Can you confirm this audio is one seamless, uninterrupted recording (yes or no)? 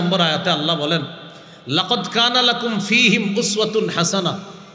yes